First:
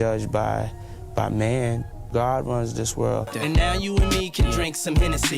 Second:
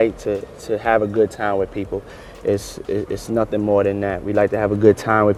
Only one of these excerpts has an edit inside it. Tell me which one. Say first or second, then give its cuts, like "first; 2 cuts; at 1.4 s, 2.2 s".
first; 2 cuts; at 1.9 s, 3.3 s